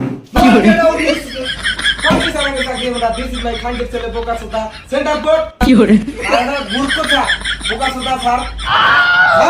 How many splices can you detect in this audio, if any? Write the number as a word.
one